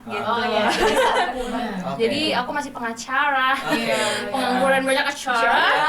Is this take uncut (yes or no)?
no